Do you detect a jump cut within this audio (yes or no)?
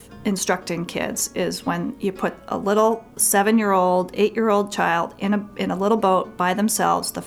no